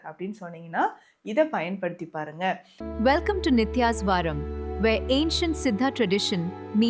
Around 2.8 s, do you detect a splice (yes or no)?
yes